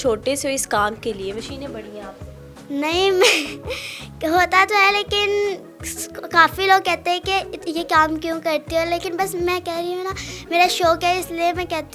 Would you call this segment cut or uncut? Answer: uncut